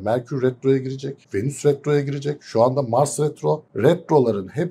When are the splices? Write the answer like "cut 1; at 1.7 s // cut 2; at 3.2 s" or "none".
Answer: cut 1; at 1.2 s // cut 2; at 3.7 s